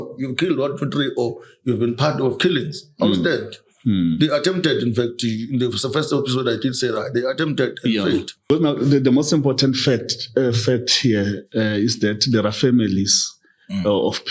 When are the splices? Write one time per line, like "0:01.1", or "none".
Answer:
0:08.5